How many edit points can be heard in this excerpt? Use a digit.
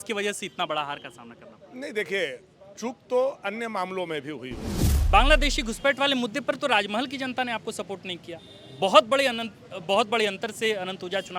1